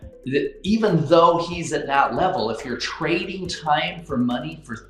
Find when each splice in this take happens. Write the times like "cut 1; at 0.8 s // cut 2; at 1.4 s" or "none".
none